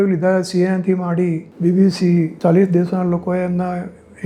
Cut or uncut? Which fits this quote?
uncut